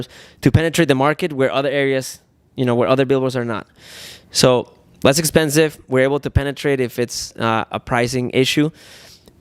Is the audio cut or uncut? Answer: uncut